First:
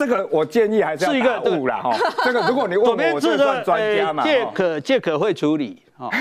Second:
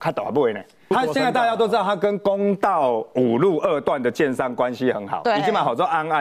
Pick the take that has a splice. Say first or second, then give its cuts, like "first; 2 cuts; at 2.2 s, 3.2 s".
second; 1 cut; at 0.9 s